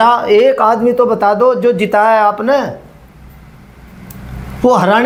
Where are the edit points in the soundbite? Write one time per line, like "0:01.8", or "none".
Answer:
none